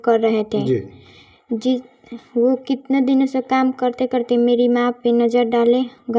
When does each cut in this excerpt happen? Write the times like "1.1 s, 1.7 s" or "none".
none